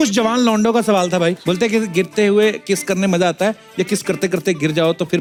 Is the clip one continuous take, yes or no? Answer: yes